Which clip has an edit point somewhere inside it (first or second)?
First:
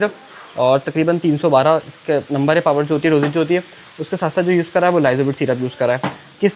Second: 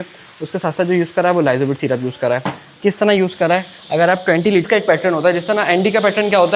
second